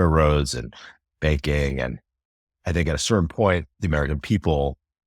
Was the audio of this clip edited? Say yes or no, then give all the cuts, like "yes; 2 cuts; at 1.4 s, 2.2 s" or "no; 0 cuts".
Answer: yes; 1 cut; at 3.7 s